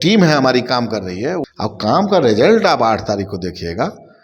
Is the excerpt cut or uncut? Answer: cut